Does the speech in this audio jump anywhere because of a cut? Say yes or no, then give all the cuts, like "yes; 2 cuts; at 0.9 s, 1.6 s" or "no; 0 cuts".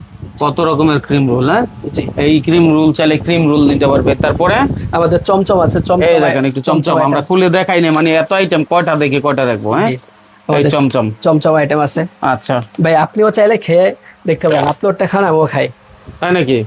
no; 0 cuts